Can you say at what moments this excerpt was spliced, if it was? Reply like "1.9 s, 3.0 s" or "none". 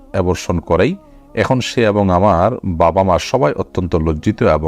none

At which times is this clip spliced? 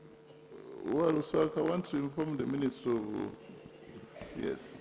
none

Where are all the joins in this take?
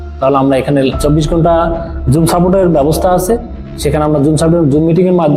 1.0 s

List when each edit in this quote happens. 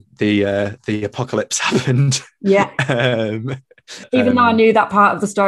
4.0 s

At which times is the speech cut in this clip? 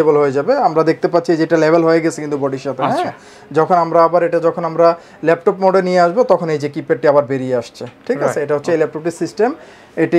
none

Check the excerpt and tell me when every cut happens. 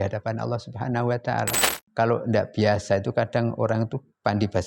1.8 s

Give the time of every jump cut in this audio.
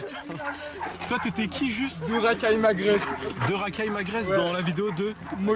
none

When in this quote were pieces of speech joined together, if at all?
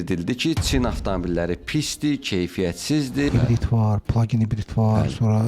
3.3 s

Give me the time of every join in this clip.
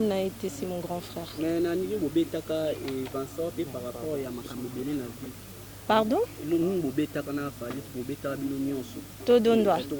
none

